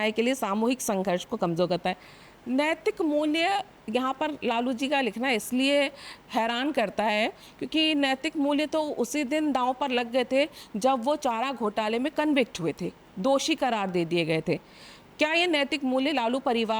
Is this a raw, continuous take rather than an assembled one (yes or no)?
yes